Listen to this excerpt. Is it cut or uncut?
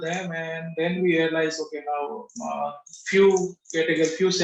uncut